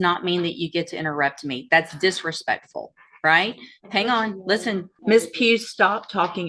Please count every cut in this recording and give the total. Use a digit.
1